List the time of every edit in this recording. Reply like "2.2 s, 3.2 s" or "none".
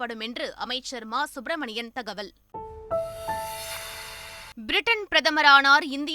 2.4 s, 4.6 s